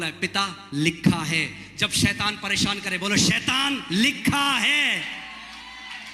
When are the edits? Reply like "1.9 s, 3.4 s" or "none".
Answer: none